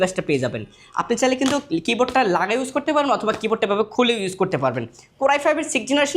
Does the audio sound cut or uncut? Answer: uncut